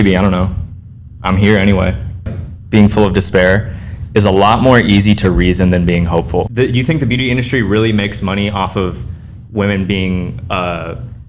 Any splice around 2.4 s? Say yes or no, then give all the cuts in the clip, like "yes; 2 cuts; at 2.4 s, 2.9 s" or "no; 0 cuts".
yes; 2 cuts; at 2.4 s, 6.5 s